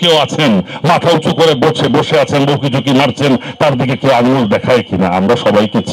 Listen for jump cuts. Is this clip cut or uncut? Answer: uncut